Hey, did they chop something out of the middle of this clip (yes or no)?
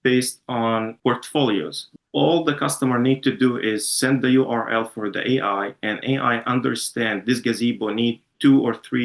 yes